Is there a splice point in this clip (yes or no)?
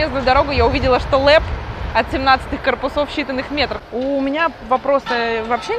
yes